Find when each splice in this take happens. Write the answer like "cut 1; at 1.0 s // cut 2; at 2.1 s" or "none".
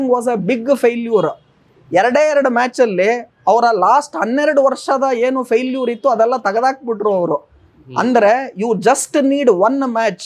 none